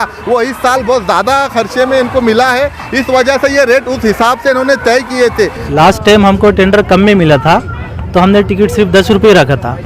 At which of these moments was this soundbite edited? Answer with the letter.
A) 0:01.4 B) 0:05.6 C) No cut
B